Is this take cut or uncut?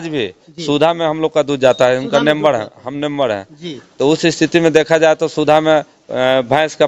uncut